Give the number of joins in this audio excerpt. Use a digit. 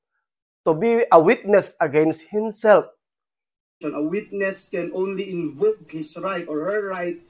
1